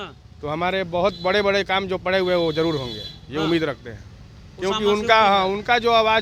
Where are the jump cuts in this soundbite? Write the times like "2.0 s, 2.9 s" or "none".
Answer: none